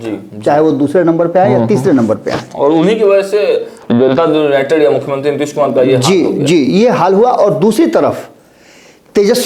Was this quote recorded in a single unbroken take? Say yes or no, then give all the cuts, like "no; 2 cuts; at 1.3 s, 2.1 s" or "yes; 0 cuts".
yes; 0 cuts